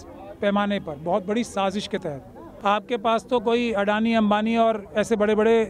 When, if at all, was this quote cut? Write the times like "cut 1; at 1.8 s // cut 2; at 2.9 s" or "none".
cut 1; at 2.4 s